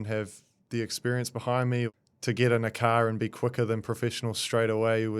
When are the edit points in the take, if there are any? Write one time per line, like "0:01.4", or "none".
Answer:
0:01.9